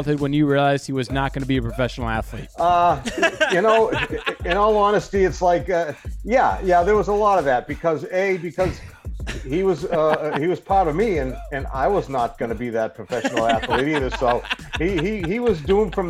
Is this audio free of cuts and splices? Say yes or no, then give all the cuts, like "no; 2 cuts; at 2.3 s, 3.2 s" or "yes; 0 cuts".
yes; 0 cuts